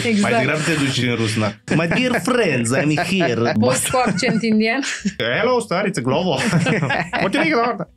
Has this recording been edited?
yes; 3 cuts; at 1.6 s, 3.5 s, 5.2 s

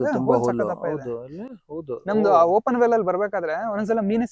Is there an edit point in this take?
no; 0 cuts

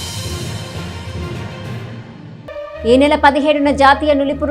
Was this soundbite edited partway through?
yes; 1 cut; at 2.1 s

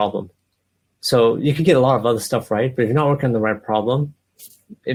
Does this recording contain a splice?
no; 0 cuts

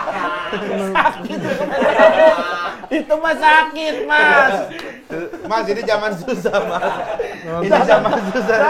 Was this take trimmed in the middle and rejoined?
no; 0 cuts

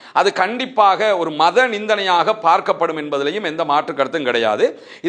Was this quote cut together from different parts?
no; 0 cuts

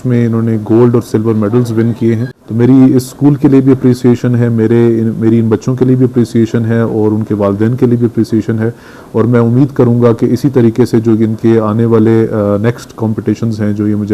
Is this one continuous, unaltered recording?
no; 1 cut; at 2.4 s

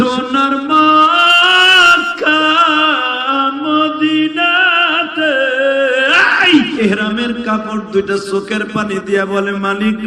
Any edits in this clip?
yes; 1 cut; at 6.7 s

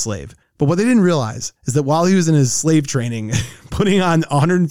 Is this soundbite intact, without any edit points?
yes; 0 cuts

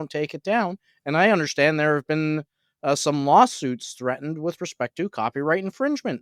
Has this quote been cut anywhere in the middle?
no; 0 cuts

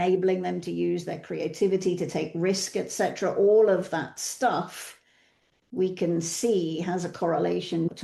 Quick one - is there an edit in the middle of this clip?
no; 0 cuts

